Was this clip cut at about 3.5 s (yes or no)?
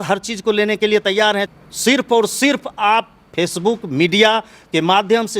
no